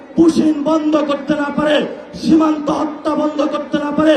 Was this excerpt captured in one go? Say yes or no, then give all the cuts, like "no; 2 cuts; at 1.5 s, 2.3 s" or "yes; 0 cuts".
yes; 0 cuts